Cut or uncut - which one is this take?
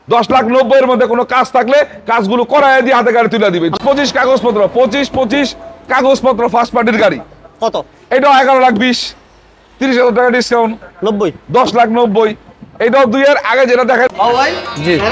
cut